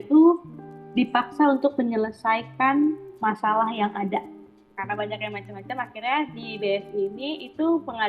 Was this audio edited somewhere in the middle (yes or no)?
yes